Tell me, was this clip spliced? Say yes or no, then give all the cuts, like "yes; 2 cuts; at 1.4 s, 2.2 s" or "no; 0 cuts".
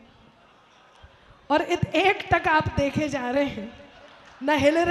no; 0 cuts